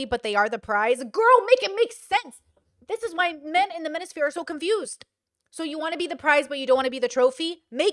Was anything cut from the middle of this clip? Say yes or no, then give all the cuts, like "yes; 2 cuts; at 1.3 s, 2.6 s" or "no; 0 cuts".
no; 0 cuts